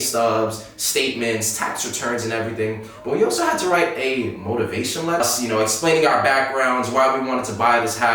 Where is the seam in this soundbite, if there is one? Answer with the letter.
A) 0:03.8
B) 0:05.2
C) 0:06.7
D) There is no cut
B